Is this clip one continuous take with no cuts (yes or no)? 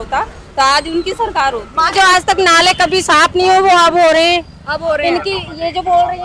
no